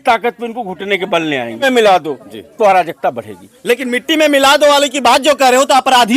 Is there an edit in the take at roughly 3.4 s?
no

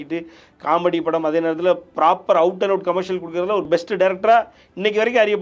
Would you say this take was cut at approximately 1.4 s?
no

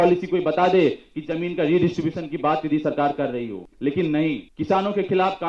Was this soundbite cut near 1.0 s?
no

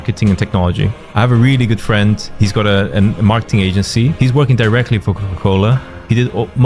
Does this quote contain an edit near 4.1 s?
yes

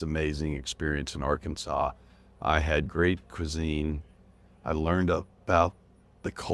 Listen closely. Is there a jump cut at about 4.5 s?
yes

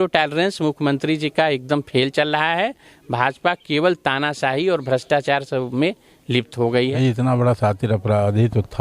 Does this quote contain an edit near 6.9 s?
yes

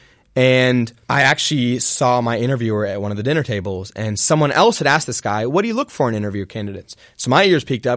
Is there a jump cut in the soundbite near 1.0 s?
yes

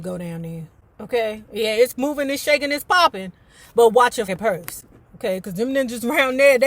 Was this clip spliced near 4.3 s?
yes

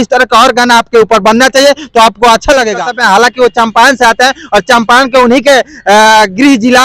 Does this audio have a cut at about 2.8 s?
yes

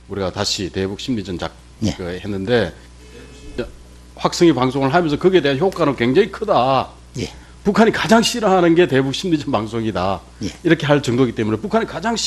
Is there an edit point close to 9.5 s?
yes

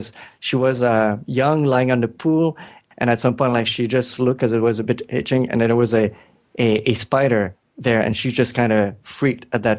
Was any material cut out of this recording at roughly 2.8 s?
yes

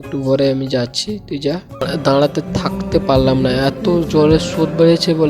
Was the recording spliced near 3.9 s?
no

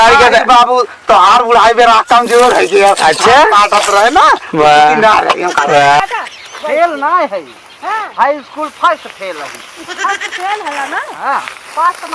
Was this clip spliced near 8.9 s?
no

